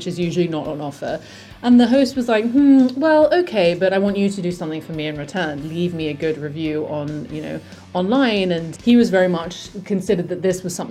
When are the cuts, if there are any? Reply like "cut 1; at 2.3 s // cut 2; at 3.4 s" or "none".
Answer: cut 1; at 8.7 s